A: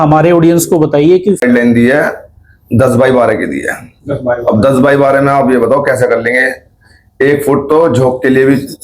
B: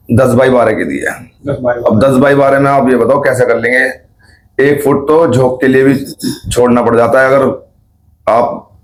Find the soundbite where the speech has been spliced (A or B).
A